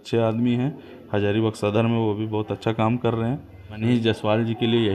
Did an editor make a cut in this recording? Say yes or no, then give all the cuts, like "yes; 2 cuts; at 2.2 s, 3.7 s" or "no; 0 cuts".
yes; 1 cut; at 3.6 s